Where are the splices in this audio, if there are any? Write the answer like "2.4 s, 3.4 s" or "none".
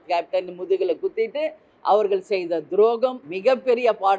3.3 s